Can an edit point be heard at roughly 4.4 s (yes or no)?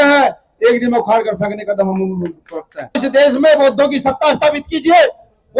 no